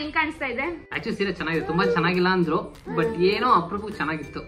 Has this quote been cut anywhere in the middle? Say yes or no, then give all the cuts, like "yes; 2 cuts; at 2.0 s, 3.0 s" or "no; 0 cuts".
yes; 1 cut; at 1.0 s